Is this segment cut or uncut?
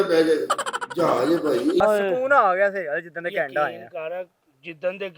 cut